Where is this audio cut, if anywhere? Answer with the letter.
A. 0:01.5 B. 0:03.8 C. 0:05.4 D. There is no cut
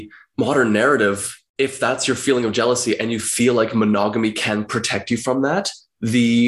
D